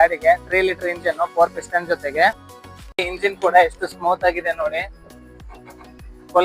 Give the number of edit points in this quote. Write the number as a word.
one